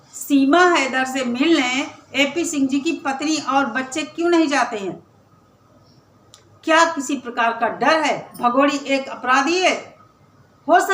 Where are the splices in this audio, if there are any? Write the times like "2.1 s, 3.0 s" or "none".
8.3 s